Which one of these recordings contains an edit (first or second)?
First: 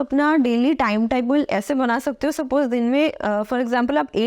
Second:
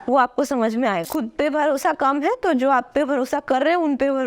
second